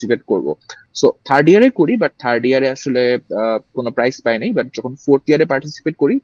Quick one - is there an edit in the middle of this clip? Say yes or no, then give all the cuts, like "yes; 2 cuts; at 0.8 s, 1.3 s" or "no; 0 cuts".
no; 0 cuts